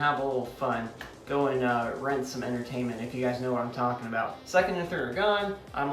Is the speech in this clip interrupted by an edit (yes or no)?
no